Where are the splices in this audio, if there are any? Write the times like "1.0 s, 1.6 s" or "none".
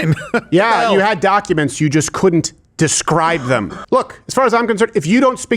3.8 s